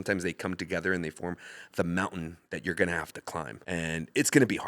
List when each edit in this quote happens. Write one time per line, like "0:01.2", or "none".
0:03.6